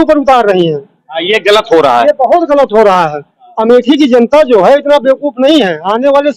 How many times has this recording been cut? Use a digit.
0